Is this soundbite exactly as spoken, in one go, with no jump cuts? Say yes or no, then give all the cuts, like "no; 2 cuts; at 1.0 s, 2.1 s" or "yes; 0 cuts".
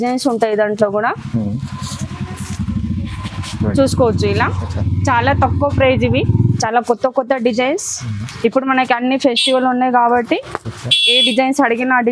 no; 1 cut; at 6.5 s